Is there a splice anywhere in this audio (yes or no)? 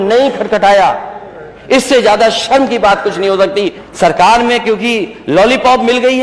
yes